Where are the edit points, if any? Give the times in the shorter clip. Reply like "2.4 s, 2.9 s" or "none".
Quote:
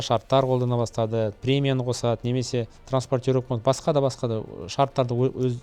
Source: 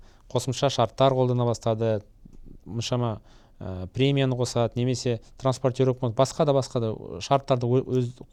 1.4 s